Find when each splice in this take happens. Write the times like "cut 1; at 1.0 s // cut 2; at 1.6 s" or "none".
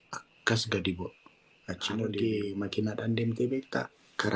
cut 1; at 2.1 s